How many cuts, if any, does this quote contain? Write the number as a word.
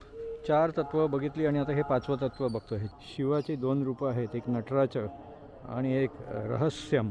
one